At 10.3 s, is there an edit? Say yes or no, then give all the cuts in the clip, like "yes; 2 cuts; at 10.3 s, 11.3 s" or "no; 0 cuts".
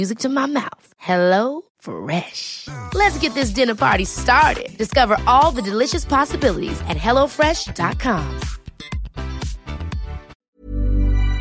yes; 1 cut; at 10.3 s